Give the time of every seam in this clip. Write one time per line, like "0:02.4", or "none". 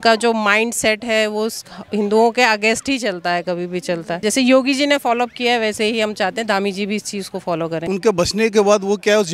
0:04.1
0:07.8